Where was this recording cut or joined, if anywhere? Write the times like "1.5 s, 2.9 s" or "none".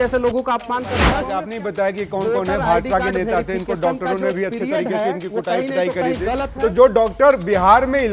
1.2 s